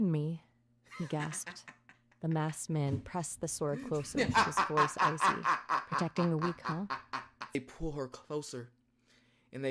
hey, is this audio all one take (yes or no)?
no